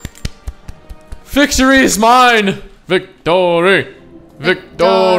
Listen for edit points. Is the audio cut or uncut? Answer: cut